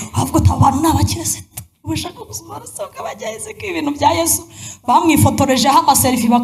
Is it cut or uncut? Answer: cut